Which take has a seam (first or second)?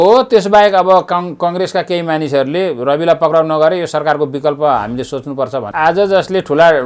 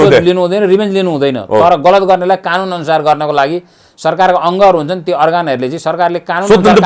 first